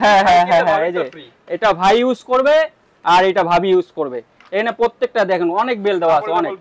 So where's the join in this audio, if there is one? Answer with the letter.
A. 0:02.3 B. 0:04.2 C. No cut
C